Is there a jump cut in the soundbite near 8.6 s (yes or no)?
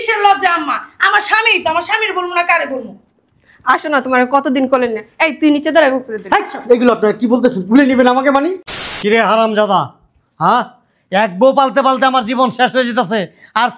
yes